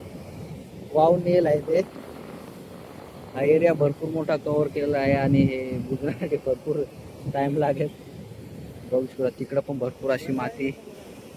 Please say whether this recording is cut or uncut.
uncut